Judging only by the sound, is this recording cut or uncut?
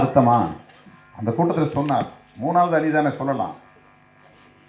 uncut